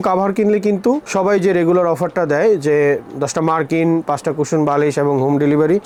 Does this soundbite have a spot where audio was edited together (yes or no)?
no